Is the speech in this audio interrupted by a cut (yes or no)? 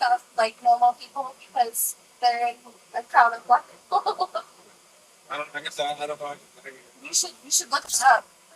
no